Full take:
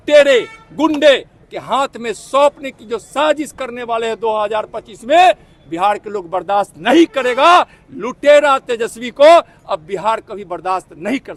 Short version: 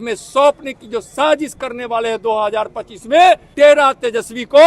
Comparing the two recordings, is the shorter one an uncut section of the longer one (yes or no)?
no